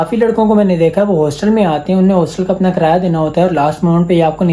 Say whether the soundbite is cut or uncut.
uncut